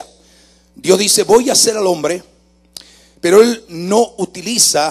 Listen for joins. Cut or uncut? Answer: cut